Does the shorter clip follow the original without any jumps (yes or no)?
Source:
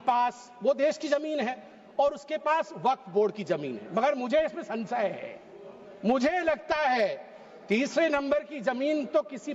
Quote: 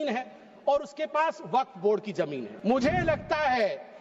no